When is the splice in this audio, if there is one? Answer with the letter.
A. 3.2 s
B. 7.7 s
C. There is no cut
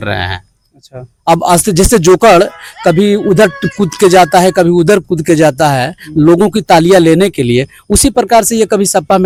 C